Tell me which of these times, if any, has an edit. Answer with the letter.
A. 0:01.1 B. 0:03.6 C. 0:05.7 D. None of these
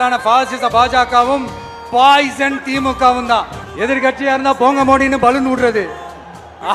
B